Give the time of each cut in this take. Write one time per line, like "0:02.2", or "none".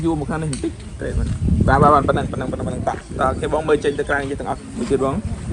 0:00.9
0:03.1